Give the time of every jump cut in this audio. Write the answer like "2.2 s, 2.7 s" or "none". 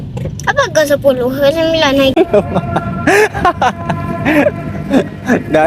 2.1 s